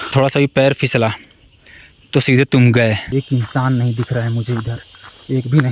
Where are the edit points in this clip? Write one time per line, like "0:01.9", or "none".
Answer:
0:03.0